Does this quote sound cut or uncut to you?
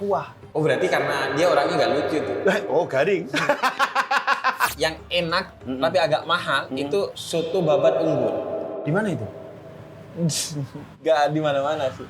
cut